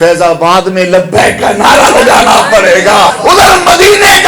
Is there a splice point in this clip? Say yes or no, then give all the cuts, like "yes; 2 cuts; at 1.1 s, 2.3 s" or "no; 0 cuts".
yes; 1 cut; at 3.2 s